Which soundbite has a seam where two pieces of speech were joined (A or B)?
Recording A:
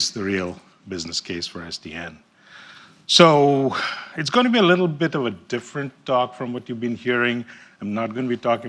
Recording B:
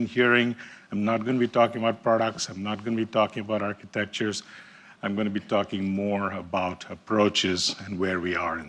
B